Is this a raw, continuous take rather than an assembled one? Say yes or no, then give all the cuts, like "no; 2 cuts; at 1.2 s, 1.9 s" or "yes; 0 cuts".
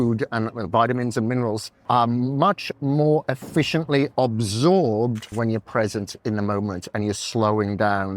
no; 2 cuts; at 1.7 s, 5.2 s